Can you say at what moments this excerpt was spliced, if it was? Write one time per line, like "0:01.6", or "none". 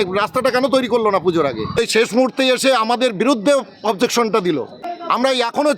0:01.7
0:04.8